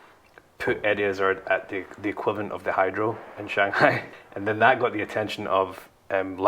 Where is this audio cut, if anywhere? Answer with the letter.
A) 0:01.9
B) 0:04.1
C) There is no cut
B